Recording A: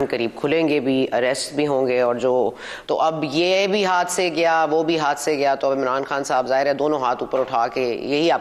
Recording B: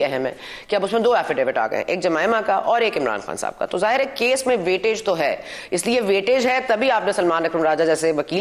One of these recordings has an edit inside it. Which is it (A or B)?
A